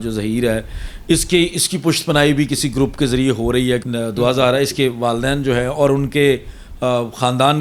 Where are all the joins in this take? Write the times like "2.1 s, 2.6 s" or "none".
3.8 s